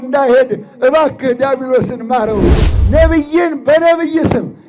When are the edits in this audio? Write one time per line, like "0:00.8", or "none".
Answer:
0:02.6